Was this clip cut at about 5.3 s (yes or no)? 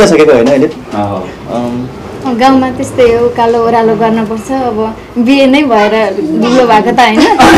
no